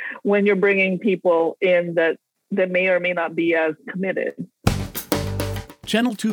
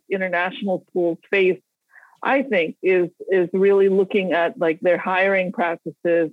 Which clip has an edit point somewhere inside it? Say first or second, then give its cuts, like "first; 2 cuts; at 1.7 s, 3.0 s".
first; 2 cuts; at 2.3 s, 4.6 s